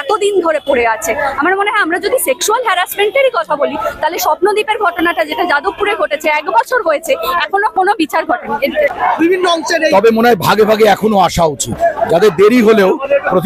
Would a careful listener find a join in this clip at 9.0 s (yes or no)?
yes